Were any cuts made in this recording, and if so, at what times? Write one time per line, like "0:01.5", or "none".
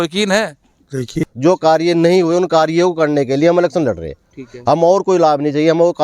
0:01.2